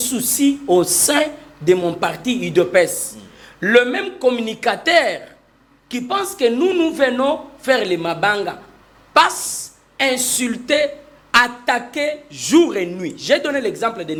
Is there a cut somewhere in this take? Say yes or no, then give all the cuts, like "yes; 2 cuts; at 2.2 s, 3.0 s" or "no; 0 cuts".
no; 0 cuts